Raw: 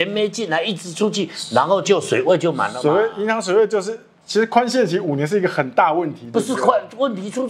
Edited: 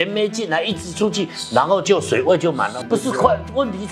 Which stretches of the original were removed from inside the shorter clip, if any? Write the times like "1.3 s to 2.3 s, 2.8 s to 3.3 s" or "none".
2.7 s to 6.2 s